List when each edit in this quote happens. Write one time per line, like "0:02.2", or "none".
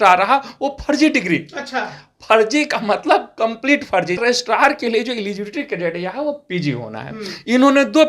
0:04.2